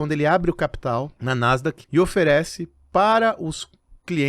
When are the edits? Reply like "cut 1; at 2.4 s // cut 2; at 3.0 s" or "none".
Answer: cut 1; at 1.3 s